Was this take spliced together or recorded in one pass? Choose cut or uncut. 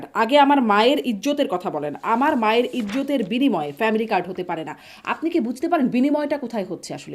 uncut